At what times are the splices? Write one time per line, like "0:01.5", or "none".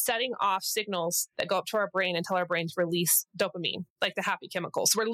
none